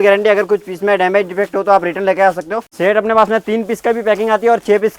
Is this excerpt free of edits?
no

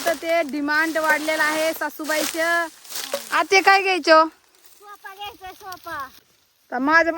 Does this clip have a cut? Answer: yes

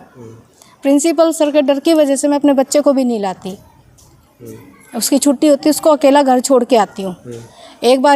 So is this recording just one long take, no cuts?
yes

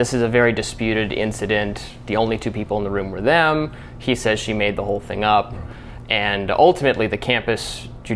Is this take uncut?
yes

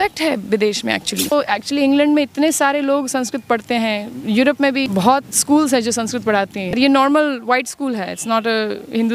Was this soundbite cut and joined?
yes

